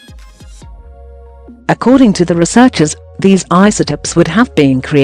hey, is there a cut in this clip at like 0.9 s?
yes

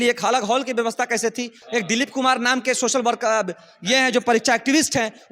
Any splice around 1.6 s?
yes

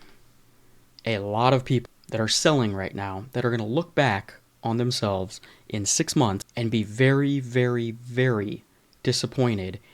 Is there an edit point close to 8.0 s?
no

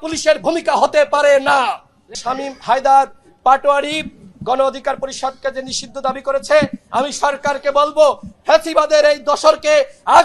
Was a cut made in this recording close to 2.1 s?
yes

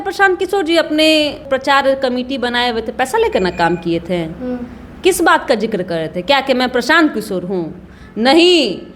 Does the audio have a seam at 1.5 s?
yes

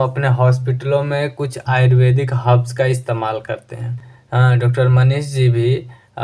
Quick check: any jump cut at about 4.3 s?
yes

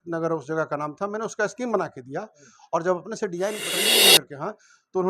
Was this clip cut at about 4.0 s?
yes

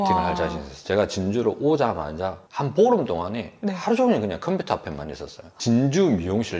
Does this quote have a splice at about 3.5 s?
no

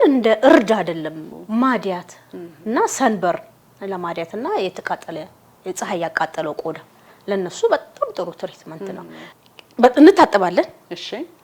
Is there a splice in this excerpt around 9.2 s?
yes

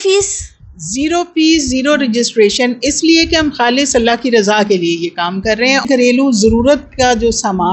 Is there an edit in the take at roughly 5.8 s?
yes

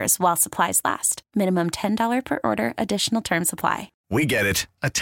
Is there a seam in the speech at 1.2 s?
no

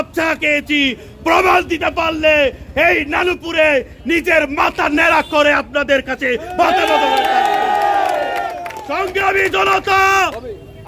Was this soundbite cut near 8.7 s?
yes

